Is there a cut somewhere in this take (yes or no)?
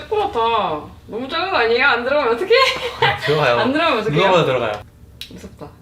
yes